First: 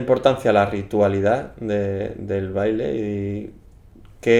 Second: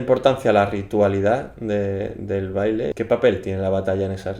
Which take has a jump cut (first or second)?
second